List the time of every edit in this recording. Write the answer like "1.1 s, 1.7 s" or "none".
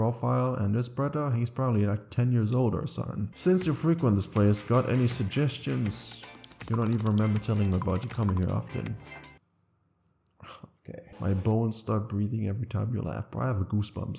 3.3 s, 11.1 s

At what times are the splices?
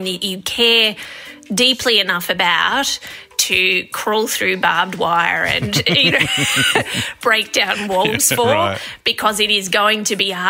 none

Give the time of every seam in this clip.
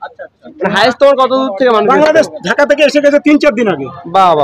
none

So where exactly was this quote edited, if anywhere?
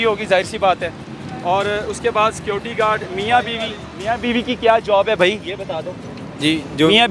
none

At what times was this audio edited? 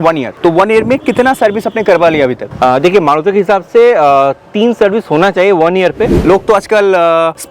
6.1 s

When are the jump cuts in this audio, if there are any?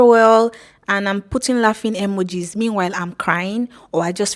none

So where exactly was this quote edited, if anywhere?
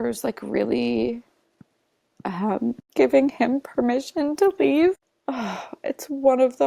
none

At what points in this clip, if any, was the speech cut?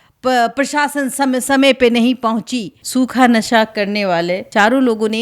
2.8 s, 4.4 s

